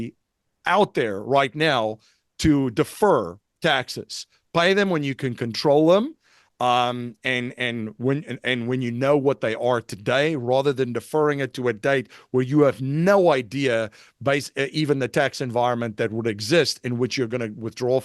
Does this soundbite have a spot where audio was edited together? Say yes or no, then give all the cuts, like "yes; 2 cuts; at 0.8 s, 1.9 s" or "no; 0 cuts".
no; 0 cuts